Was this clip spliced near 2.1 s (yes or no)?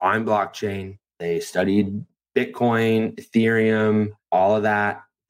yes